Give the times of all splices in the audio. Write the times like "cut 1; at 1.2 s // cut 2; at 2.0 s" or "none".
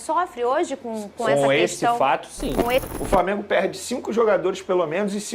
cut 1; at 2.9 s